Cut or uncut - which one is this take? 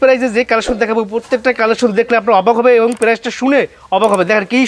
uncut